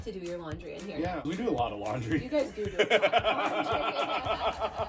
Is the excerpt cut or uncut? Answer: cut